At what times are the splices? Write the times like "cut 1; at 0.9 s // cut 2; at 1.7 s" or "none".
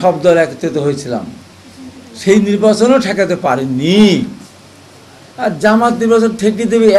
none